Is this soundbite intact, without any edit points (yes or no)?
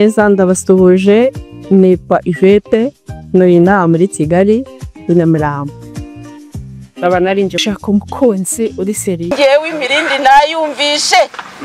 no